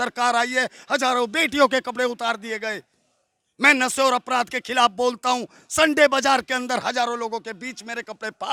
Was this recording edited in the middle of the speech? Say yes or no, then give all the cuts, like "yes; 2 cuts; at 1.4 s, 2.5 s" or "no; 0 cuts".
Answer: no; 0 cuts